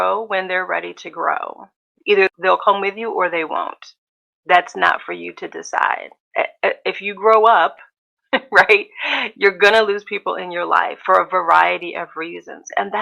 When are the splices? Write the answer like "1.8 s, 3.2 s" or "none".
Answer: 2.1 s, 6.2 s